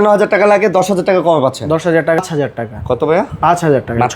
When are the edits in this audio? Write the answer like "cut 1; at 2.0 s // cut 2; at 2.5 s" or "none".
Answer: cut 1; at 2.2 s